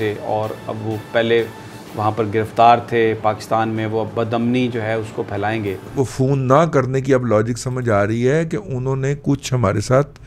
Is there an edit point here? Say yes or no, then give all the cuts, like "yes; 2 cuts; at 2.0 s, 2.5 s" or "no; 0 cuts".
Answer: yes; 1 cut; at 5.9 s